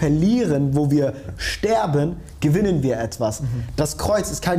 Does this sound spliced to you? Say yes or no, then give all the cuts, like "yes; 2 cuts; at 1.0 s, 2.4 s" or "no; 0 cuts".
no; 0 cuts